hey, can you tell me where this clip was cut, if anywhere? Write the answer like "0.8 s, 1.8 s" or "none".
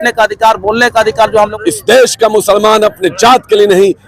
1.5 s